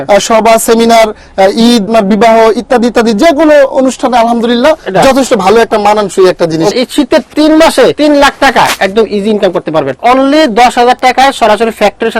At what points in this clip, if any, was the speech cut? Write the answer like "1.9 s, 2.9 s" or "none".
1.9 s, 6.7 s, 8.0 s, 10.0 s

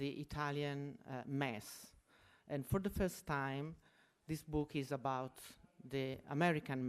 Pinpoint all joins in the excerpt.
4.9 s

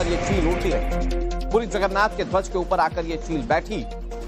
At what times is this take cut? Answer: none

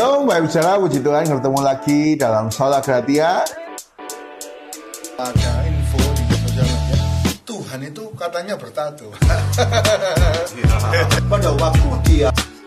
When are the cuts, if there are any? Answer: none

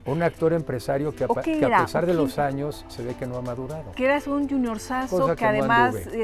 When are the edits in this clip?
3.9 s

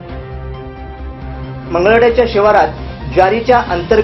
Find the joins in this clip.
1.2 s

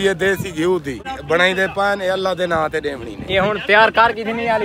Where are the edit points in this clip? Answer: 1.1 s

